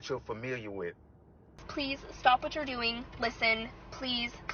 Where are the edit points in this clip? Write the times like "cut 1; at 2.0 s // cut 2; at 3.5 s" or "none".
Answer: cut 1; at 1.6 s